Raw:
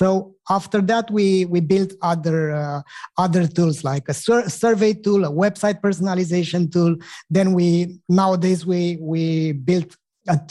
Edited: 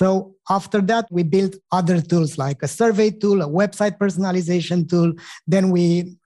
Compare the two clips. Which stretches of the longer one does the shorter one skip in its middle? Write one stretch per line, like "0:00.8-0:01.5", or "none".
0:01.1-0:02.5
0:04.2-0:04.5